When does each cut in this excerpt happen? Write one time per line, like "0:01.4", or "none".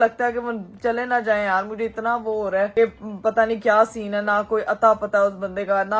none